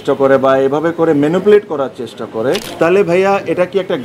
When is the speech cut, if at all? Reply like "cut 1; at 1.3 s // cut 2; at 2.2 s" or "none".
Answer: cut 1; at 2.7 s